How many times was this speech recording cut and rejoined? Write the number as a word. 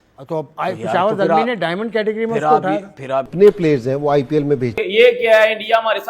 two